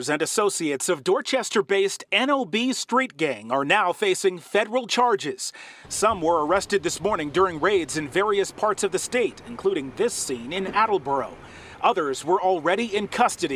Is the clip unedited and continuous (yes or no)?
yes